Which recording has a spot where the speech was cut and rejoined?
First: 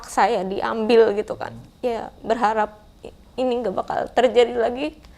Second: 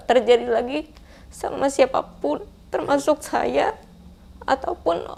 first; 1 cut; at 1.4 s

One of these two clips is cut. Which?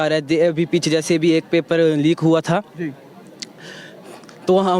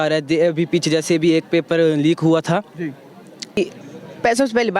second; 1 cut; at 3.6 s

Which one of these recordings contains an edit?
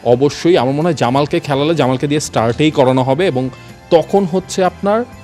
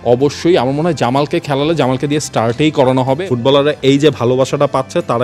second; 1 cut; at 3.2 s

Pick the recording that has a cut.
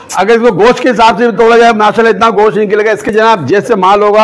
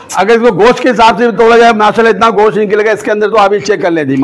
first; 1 cut; at 3.1 s

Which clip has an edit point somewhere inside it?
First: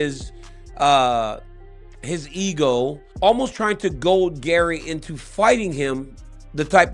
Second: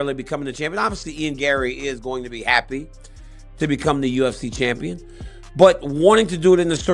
first; 1 cut; at 3.0 s

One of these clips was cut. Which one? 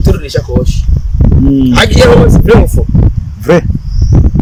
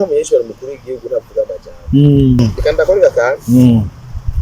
second; 1 cut; at 2.4 s

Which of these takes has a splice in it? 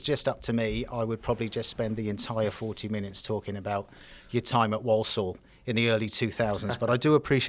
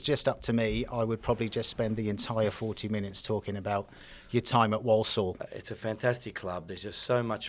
second; 1 cut; at 5.5 s

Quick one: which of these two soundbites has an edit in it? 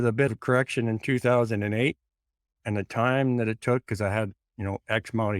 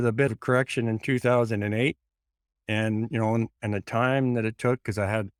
first; 1 cut; at 2.6 s

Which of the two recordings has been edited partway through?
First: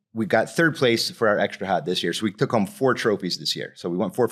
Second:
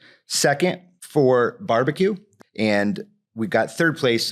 second; 2 cuts; at 0.9 s, 2.3 s

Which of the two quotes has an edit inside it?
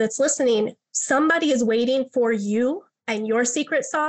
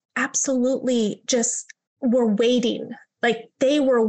first; 1 cut; at 2.9 s

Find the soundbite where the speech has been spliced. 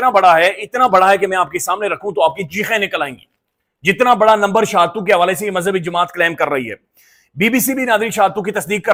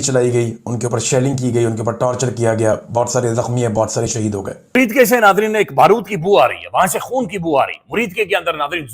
second; 1 cut; at 4.8 s

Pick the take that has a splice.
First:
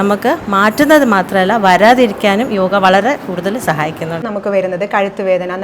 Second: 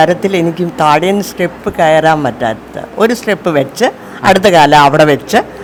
first; 1 cut; at 4.3 s

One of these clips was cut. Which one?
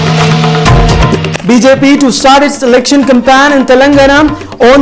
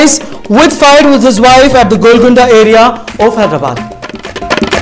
first; 1 cut; at 1.2 s

